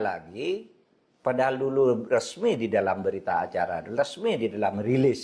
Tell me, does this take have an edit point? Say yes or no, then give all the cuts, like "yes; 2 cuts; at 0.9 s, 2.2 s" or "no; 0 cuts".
no; 0 cuts